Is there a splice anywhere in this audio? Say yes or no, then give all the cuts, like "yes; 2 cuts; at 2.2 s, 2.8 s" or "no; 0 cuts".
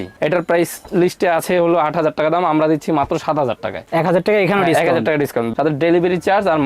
yes; 1 cut; at 5.5 s